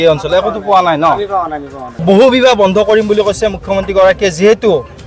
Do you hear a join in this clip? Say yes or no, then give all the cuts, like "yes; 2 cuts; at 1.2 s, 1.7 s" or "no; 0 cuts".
yes; 1 cut; at 2.0 s